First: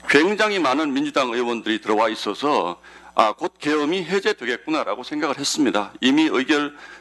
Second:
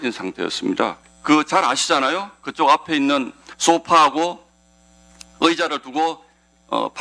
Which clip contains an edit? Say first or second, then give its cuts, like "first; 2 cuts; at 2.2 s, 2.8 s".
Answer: second; 1 cut; at 1.0 s